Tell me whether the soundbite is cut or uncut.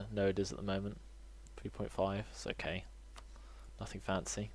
uncut